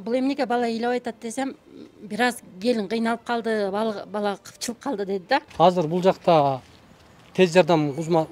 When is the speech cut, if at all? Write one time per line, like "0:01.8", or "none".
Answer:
0:05.5